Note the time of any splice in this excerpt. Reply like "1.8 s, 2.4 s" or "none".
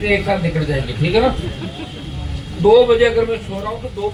none